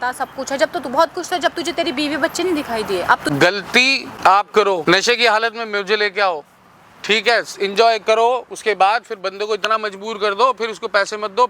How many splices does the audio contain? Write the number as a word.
three